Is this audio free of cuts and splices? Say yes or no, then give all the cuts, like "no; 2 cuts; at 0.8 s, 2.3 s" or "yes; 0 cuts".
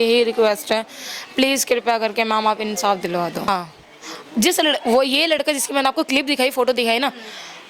no; 1 cut; at 3.5 s